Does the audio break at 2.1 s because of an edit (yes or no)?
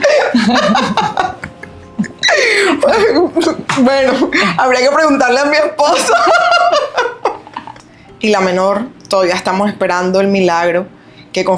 no